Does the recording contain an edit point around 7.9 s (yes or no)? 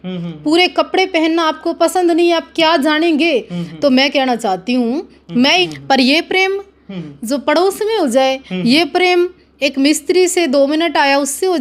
no